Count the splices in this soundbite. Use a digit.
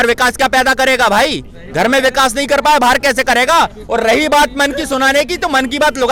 0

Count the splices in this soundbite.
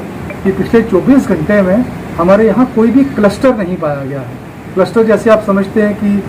0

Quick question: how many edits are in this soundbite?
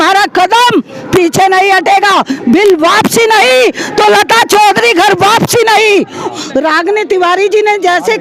1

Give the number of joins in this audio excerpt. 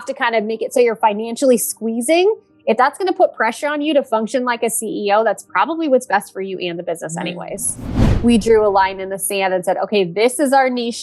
1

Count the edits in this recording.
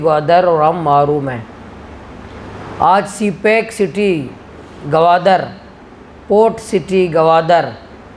0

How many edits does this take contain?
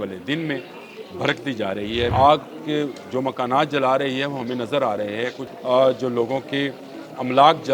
2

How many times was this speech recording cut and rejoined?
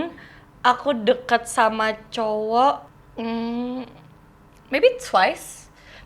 1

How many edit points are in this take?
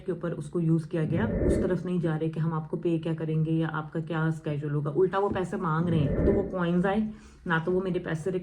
2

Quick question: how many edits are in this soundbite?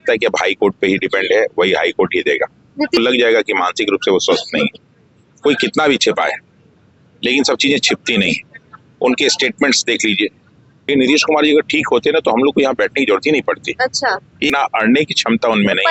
3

